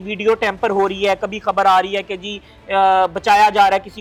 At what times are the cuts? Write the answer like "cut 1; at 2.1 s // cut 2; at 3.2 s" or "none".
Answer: none